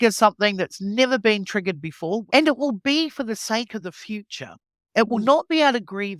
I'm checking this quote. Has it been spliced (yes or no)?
yes